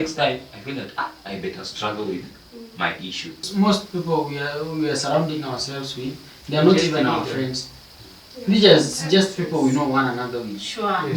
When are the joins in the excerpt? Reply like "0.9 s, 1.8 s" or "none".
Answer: 3.5 s